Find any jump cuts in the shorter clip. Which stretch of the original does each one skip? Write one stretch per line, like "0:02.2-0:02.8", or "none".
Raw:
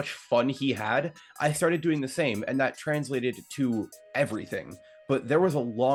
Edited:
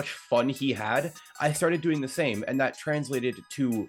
none